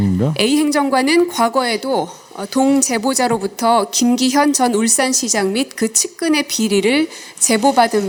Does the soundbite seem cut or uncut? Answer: uncut